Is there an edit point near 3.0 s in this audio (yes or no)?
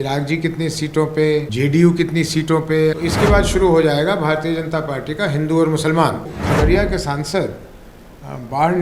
yes